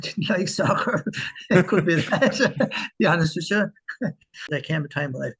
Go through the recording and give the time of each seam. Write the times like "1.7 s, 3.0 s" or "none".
4.4 s